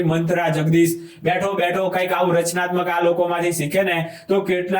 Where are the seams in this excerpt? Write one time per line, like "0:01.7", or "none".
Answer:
none